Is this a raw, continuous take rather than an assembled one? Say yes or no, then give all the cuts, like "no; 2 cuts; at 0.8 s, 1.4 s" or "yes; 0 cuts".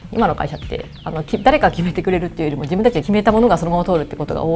no; 1 cut; at 3.0 s